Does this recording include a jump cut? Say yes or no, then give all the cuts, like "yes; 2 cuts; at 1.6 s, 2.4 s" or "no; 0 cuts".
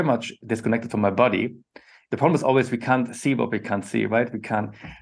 yes; 1 cut; at 2.0 s